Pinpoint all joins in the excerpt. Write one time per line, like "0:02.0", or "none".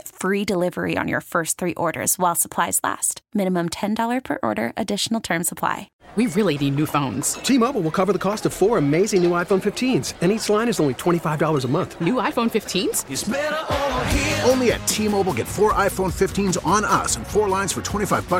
0:05.9